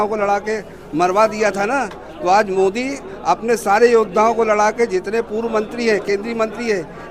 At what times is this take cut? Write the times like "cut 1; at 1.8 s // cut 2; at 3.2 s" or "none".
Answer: none